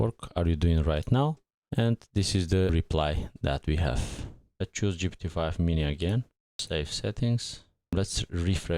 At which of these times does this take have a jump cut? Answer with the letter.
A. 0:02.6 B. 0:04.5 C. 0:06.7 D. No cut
B